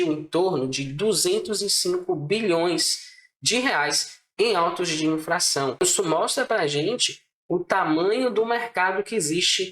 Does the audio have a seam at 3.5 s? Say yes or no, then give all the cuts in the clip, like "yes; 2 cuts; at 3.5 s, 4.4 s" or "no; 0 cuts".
no; 1 cut; at 5.8 s